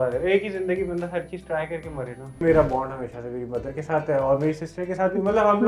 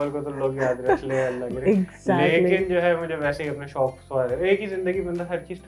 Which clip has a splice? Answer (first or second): first